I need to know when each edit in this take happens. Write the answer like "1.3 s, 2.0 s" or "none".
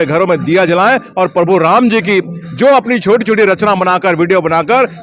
none